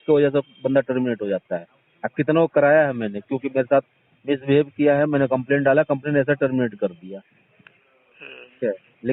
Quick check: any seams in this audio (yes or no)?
no